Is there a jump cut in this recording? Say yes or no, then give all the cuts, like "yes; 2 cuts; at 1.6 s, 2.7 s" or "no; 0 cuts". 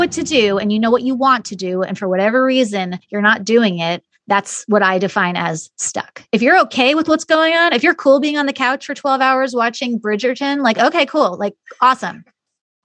no; 0 cuts